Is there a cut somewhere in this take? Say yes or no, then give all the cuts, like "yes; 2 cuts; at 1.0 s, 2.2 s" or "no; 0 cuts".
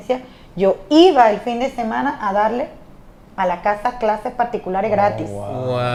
no; 0 cuts